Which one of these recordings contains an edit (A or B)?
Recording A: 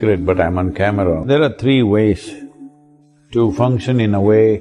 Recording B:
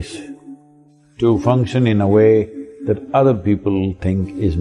A